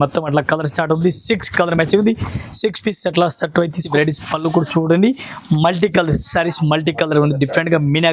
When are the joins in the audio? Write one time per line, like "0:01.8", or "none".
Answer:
0:03.8